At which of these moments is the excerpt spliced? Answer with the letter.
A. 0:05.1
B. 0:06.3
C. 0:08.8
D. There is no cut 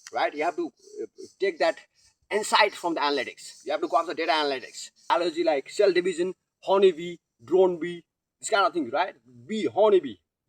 A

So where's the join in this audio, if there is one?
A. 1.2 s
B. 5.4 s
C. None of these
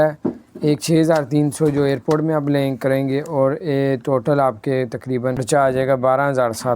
B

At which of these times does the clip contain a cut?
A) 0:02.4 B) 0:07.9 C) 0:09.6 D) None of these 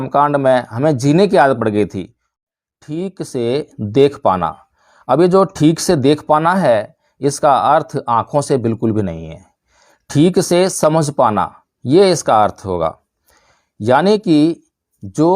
A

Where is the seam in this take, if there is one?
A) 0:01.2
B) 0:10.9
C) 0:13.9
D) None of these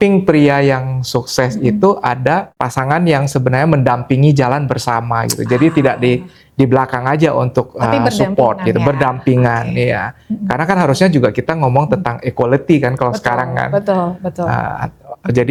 D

